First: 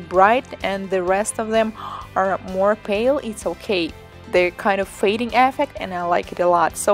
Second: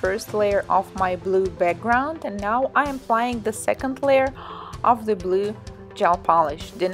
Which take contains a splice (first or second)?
first